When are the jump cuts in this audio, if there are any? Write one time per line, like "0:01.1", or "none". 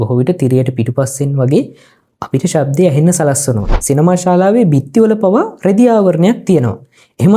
0:03.7

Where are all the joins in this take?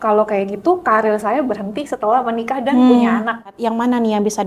0:03.5

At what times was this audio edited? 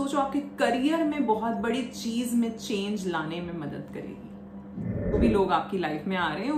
0:05.1

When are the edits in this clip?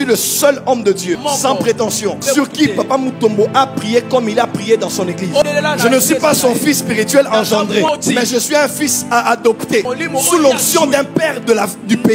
0:01.2
0:02.2
0:05.4
0:07.9
0:09.9

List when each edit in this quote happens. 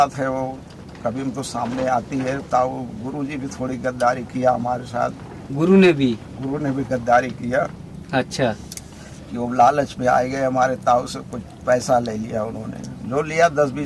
none

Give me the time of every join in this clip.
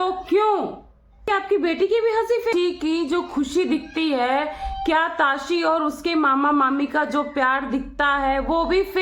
0:01.3
0:02.5

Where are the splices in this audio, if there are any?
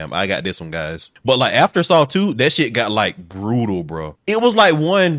0:01.1
0:04.1

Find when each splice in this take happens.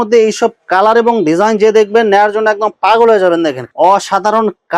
0:03.6

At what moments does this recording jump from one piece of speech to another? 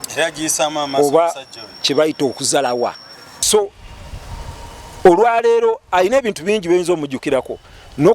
0:03.4

